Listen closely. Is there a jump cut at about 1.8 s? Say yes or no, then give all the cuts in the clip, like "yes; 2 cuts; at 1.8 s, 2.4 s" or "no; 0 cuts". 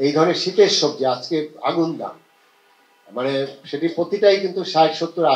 no; 0 cuts